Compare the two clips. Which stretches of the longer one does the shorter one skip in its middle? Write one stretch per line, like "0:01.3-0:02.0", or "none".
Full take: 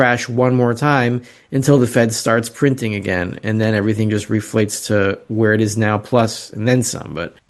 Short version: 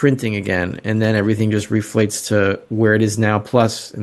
none